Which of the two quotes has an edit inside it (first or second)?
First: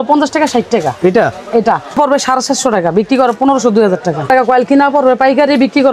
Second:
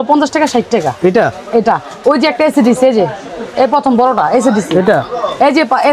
first